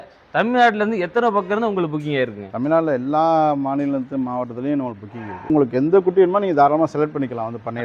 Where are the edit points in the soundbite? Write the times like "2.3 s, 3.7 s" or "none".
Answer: 5.5 s